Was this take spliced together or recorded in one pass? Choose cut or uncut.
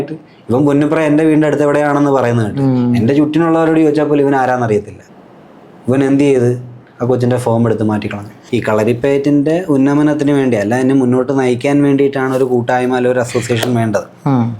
cut